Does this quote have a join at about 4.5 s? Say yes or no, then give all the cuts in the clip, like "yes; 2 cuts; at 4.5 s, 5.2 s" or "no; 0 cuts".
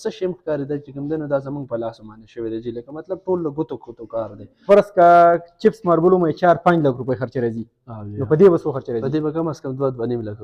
yes; 1 cut; at 4.5 s